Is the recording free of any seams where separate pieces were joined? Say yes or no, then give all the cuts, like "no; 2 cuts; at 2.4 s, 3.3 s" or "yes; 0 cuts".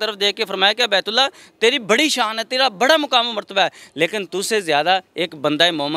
yes; 0 cuts